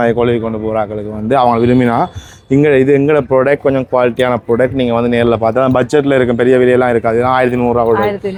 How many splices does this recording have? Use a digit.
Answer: 0